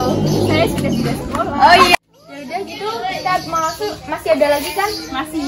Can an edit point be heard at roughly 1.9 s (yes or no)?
yes